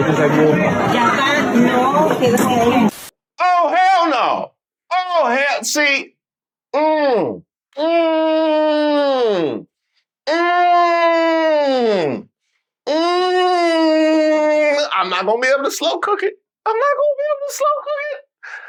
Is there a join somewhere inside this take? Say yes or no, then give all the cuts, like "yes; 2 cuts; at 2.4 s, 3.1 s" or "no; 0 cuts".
no; 0 cuts